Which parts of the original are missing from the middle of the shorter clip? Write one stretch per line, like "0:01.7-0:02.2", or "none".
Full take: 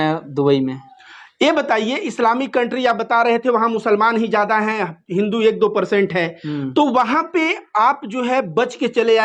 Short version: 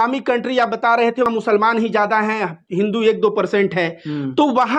0:03.5-0:03.6